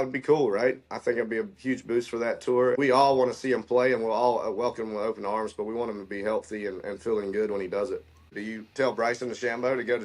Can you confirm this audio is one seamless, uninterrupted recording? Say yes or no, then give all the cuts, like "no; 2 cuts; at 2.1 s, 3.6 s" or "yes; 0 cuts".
no; 2 cuts; at 2.8 s, 8.4 s